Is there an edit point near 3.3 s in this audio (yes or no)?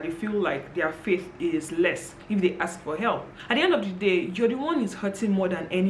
yes